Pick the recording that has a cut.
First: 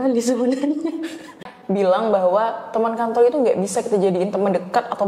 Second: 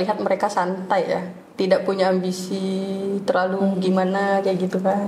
first; 1 cut; at 1.5 s

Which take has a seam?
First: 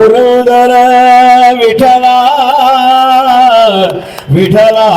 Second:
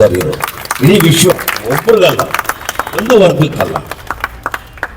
second; 1 cut; at 1.4 s

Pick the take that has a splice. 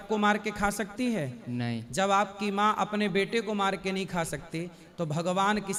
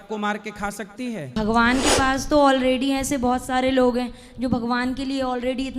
second; 1 cut; at 1.4 s

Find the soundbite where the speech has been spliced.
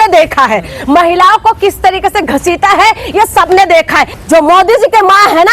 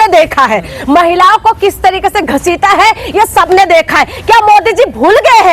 first; 1 cut; at 4.1 s

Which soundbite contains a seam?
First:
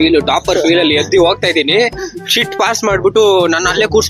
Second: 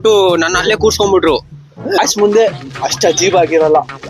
second; 1 cut; at 2.0 s

